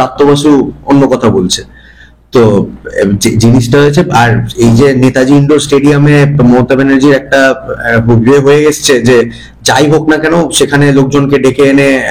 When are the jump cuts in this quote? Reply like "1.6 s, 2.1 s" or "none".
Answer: none